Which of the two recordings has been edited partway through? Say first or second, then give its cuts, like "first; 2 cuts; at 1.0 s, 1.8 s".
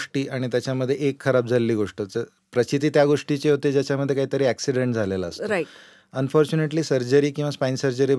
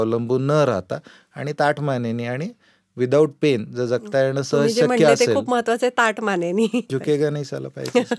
second; 1 cut; at 6.9 s